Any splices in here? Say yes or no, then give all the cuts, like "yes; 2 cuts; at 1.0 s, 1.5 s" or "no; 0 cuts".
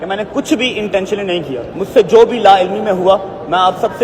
yes; 1 cut; at 1.7 s